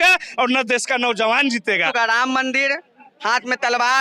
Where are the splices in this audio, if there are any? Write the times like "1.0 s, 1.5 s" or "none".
1.9 s